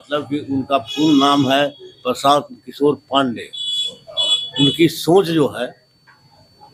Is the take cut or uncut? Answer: uncut